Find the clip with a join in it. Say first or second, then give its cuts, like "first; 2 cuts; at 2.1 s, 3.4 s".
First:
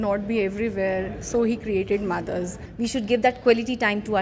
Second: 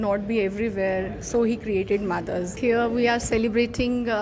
first; 1 cut; at 2.5 s